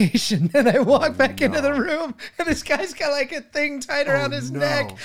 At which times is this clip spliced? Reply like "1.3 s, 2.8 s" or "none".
none